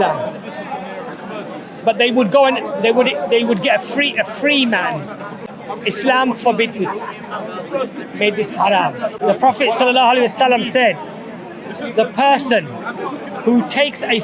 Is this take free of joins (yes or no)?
no